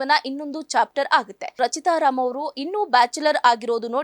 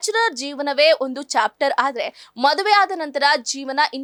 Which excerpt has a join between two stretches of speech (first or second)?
first